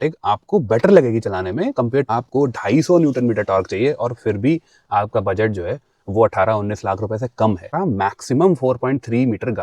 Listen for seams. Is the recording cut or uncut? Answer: cut